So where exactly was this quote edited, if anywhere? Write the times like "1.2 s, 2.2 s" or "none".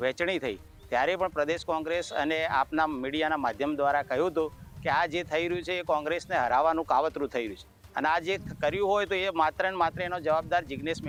none